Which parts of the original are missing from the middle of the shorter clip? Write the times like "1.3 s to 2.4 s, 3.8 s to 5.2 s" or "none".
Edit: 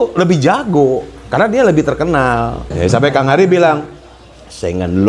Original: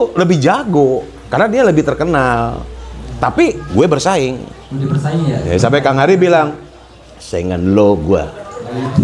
2.7 s to 5.4 s